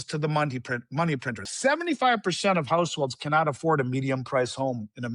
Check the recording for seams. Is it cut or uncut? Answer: cut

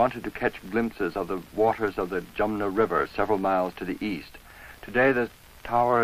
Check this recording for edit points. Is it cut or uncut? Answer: cut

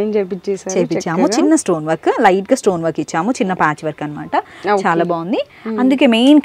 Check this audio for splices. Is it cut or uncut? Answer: uncut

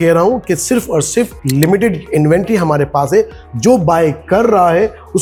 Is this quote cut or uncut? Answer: uncut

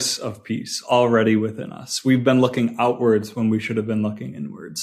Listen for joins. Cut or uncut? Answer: uncut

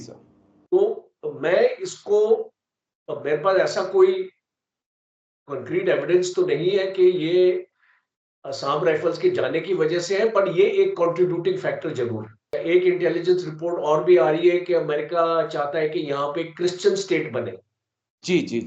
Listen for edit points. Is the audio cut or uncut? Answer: cut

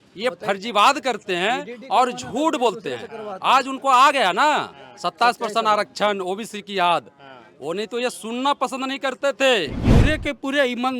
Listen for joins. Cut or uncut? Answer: cut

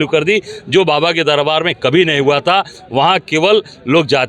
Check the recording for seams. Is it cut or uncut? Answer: uncut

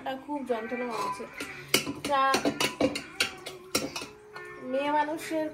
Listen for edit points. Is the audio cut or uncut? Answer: uncut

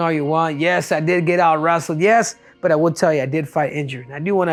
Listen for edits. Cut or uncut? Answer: uncut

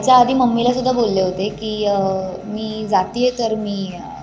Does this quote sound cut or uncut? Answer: uncut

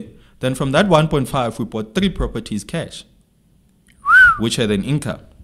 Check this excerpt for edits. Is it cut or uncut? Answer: uncut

